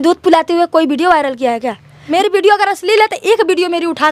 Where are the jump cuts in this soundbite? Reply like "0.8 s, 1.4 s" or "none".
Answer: 2.1 s